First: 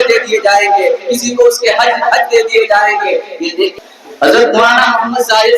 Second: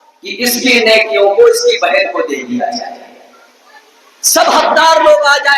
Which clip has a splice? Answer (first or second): first